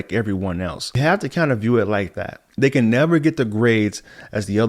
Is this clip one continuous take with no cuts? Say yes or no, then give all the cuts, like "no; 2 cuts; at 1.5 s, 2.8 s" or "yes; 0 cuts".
no; 1 cut; at 1.0 s